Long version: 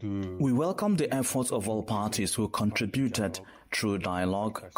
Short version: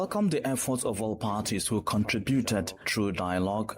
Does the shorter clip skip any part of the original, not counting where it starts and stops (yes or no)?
yes